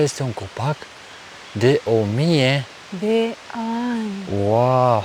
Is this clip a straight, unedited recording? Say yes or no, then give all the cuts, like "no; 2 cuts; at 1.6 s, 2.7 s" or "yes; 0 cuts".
yes; 0 cuts